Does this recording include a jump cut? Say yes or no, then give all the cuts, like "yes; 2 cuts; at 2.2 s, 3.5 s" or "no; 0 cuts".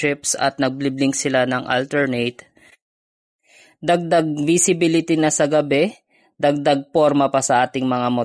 no; 0 cuts